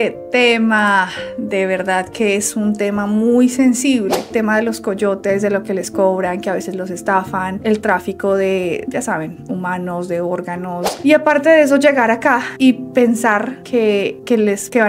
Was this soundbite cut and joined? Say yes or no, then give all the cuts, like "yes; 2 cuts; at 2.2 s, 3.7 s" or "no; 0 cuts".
yes; 2 cuts; at 4.3 s, 10.9 s